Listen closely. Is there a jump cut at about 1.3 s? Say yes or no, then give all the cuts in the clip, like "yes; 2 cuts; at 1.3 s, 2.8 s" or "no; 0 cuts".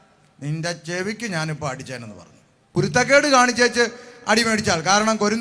no; 1 cut; at 2.8 s